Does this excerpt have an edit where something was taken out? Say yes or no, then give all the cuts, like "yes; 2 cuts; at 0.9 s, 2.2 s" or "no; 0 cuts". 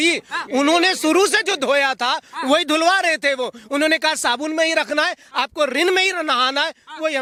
no; 0 cuts